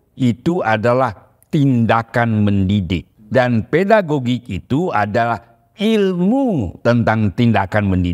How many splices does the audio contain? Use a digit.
1